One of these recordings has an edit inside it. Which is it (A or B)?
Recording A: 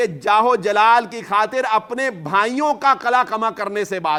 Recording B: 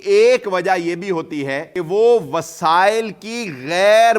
B